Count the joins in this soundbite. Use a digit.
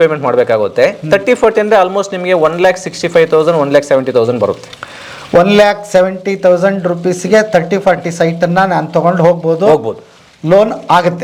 0